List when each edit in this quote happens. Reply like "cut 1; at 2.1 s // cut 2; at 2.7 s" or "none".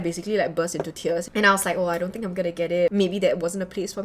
cut 1; at 2.9 s